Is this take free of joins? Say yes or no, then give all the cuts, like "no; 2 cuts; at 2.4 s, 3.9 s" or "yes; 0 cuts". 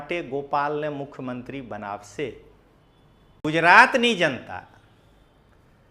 no; 1 cut; at 3.4 s